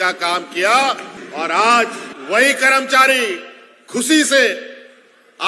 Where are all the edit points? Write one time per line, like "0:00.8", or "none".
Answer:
0:01.2
0:02.1